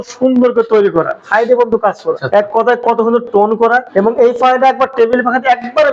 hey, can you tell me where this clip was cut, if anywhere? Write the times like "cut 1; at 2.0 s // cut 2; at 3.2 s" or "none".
cut 1; at 1.2 s // cut 2; at 2.2 s // cut 3; at 3.9 s

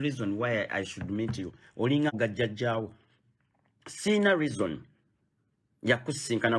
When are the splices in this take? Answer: cut 1; at 2.1 s

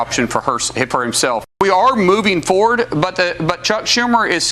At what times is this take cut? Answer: cut 1; at 1.5 s

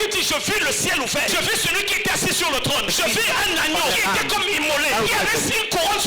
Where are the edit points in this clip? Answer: cut 1; at 1.3 s // cut 2; at 2.9 s // cut 3; at 3.9 s // cut 4; at 5.1 s

